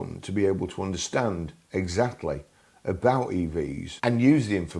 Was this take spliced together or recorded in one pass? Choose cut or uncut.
cut